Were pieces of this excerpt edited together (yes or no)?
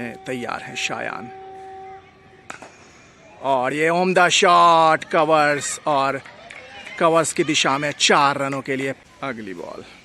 yes